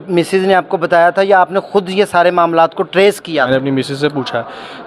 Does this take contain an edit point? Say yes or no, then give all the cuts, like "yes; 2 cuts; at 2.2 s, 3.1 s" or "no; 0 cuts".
yes; 1 cut; at 3.5 s